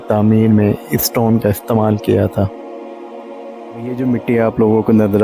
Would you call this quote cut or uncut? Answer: cut